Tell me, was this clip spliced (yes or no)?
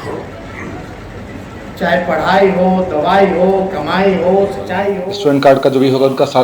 yes